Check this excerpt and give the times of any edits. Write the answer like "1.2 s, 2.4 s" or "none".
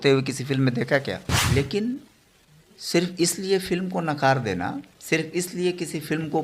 1.3 s